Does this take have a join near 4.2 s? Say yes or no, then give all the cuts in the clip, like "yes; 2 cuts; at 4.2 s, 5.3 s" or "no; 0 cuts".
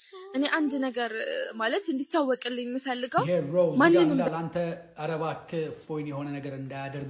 yes; 1 cut; at 4.2 s